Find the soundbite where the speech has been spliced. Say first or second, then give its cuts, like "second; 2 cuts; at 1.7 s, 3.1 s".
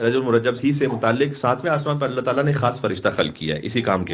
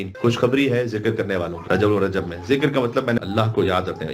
second; 2 cuts; at 1.6 s, 3.2 s